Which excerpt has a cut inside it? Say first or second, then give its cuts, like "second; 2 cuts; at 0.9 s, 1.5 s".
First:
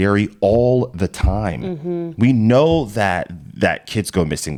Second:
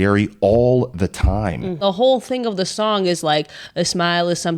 second; 1 cut; at 1.8 s